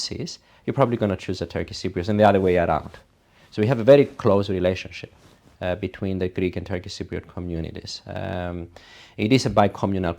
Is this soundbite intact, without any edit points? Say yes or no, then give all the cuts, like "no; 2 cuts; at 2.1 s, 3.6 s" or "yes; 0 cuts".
yes; 0 cuts